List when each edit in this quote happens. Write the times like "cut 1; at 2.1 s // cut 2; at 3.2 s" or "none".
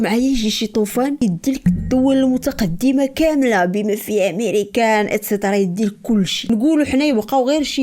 cut 1; at 1.2 s